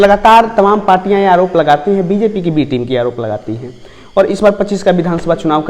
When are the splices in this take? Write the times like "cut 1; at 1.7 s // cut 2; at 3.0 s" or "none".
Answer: none